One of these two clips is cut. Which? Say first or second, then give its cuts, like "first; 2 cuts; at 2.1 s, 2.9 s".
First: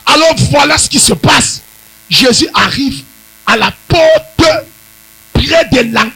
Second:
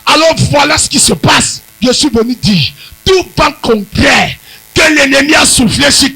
second; 1 cut; at 1.6 s